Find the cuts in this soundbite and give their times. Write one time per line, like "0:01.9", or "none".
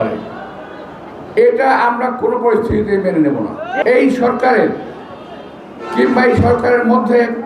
0:03.8